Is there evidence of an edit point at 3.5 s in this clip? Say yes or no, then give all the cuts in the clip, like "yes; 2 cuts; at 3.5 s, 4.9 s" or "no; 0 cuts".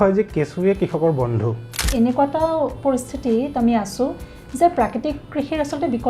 no; 1 cut; at 1.8 s